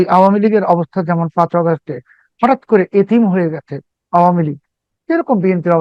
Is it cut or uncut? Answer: uncut